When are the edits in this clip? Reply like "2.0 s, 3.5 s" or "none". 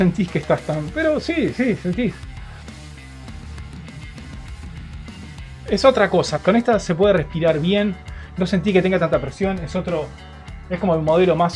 5.6 s, 6.3 s